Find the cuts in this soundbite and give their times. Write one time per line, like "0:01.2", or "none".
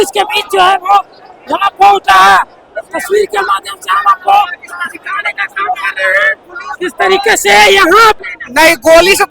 0:08.2